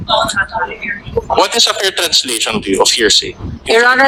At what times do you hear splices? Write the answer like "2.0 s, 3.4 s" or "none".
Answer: none